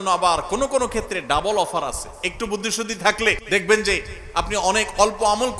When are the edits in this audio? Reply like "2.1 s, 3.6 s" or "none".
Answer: 3.4 s